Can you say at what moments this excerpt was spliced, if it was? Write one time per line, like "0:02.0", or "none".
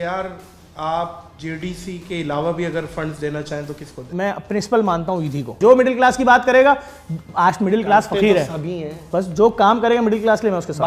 0:01.3
0:04.1
0:05.6